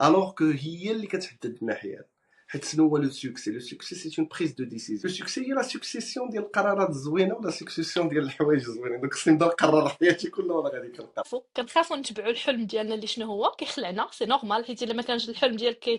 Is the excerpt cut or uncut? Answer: cut